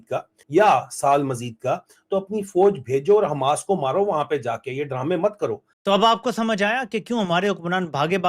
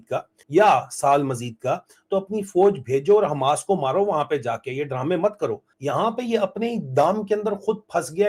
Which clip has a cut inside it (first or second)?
first